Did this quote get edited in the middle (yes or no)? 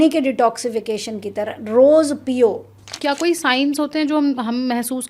yes